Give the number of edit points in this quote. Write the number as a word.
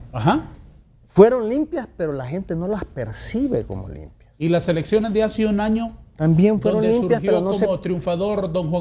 one